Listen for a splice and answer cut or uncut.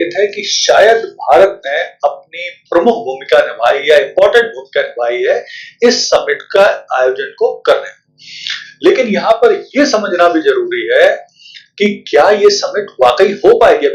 uncut